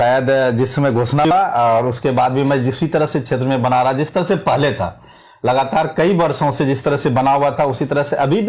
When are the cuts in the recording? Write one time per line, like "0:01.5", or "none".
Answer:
0:01.3